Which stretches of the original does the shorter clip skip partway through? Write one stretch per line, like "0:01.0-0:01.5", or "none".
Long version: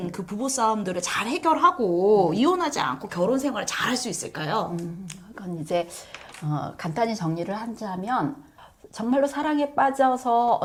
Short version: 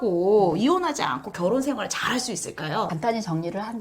0:04.7-0:06.8